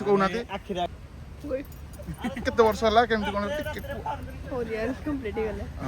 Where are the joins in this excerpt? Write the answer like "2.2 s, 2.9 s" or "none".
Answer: 0.9 s, 2.4 s